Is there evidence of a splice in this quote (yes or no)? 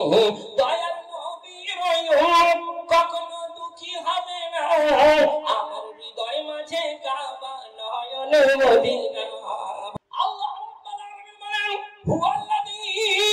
yes